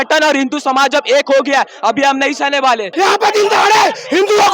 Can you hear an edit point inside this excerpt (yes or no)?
yes